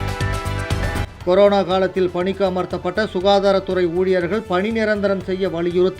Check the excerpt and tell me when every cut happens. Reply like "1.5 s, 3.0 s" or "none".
1.1 s